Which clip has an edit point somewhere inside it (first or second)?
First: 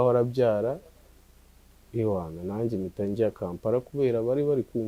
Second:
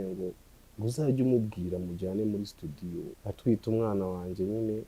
second